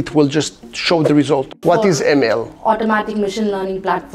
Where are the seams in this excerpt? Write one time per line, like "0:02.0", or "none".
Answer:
0:01.5